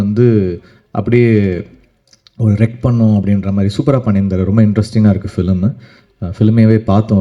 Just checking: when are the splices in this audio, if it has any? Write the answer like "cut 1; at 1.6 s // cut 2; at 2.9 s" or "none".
none